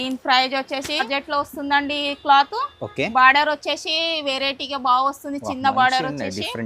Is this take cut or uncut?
cut